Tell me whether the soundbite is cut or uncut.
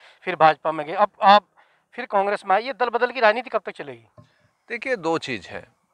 uncut